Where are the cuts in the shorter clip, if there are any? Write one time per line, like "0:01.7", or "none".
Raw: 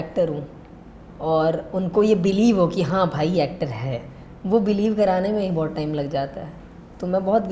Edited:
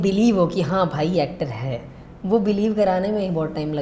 none